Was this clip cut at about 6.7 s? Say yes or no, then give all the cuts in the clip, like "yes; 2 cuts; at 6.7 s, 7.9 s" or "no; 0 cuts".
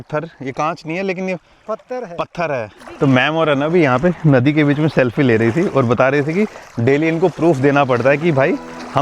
no; 1 cut; at 2.8 s